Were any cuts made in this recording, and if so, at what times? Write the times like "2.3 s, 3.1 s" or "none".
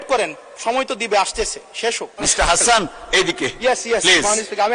2.3 s